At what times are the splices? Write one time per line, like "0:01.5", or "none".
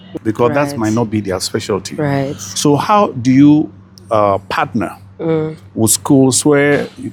none